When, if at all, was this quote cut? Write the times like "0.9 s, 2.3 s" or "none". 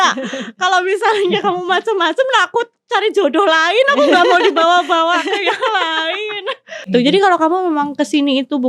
6.9 s